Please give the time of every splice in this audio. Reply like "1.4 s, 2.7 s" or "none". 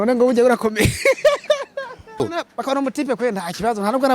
2.2 s

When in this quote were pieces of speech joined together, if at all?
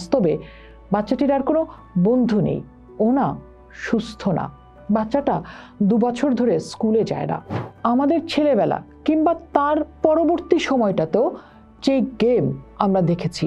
none

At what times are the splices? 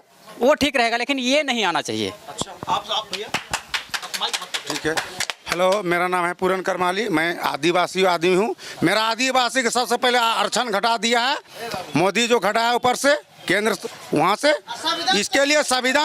none

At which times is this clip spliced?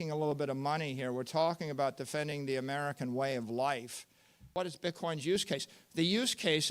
4.5 s

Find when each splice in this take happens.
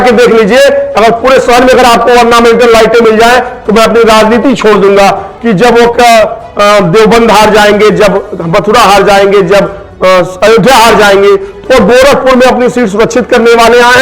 5.3 s

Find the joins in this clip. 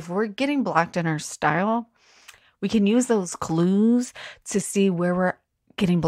none

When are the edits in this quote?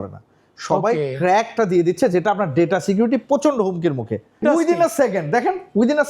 4.4 s

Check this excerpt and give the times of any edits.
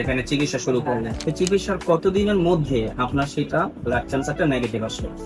1.1 s

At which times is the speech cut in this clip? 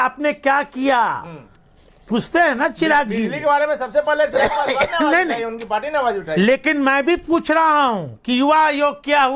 none

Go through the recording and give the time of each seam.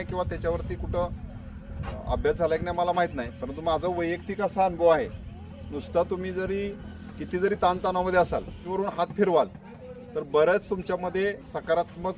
8.6 s

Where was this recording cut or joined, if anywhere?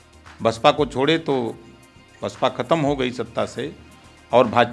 none

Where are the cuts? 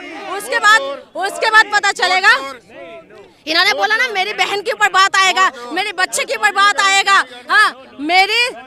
none

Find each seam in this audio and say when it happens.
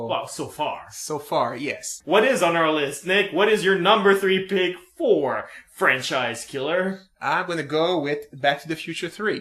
6.4 s

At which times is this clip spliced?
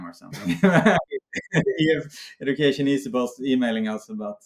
1.2 s

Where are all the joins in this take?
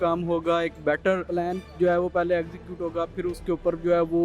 1.3 s

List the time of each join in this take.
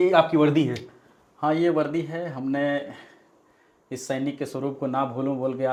none

